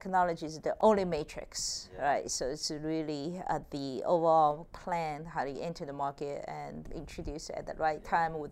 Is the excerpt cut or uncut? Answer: cut